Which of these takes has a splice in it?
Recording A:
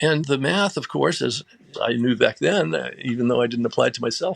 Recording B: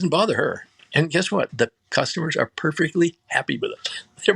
B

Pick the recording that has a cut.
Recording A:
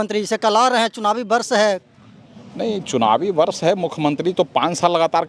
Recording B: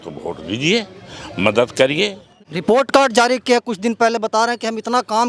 B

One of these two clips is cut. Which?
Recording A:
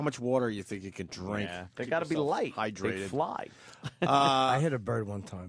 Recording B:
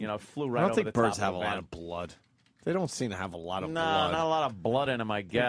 B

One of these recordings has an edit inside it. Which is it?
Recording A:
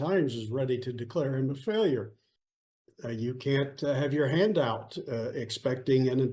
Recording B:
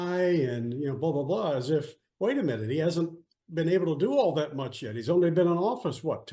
A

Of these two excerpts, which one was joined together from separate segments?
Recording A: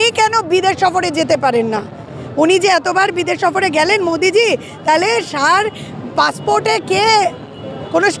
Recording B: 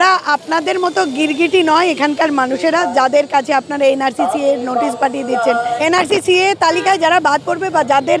B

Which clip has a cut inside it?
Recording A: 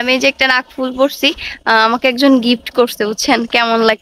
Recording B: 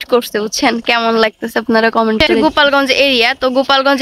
B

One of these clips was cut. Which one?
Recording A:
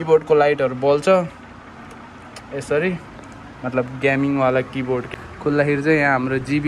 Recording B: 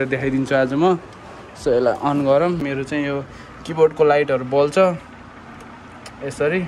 B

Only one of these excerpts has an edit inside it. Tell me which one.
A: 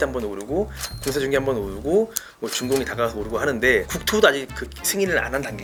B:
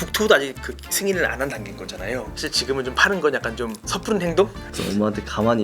B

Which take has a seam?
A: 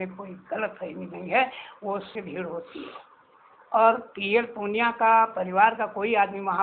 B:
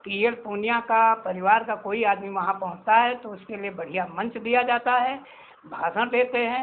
A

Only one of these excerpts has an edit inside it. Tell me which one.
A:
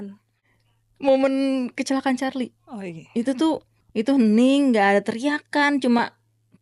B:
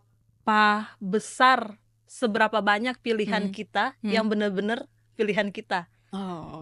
A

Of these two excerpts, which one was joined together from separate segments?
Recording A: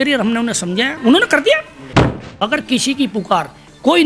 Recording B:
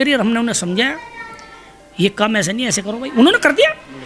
A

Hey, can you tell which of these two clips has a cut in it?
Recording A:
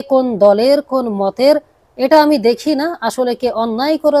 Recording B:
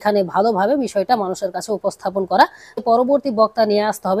B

